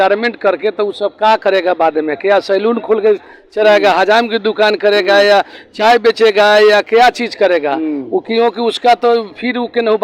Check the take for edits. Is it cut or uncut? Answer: uncut